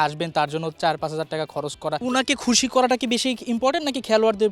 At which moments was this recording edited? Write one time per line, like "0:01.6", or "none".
0:02.0